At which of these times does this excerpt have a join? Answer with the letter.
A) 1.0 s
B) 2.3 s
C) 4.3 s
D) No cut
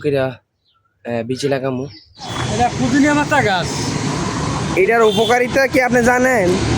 B